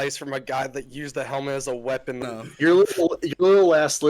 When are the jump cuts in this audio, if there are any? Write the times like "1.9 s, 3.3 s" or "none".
2.2 s